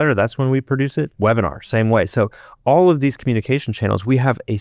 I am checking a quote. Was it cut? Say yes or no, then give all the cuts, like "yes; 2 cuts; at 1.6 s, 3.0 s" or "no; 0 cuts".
yes; 1 cut; at 1.1 s